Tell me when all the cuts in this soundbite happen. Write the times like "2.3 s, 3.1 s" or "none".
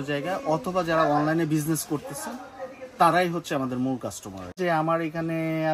4.6 s